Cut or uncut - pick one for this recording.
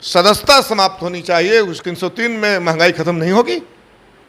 cut